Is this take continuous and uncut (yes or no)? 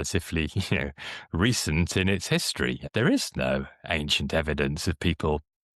no